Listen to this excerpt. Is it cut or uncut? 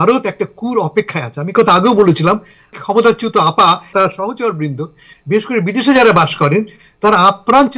cut